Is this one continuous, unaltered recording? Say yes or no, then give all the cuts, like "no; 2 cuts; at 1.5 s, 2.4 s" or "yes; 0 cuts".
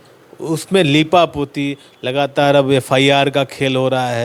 yes; 0 cuts